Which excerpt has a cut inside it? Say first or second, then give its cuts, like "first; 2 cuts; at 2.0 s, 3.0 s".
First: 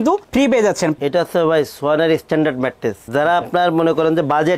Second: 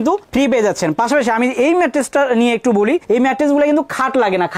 first; 1 cut; at 0.9 s